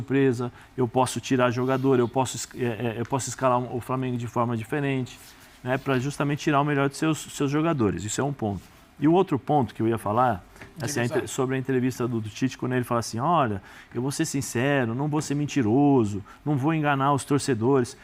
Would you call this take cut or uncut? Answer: uncut